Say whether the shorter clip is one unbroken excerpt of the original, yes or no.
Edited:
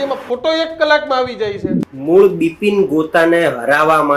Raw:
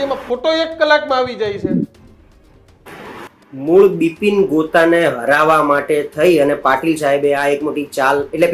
no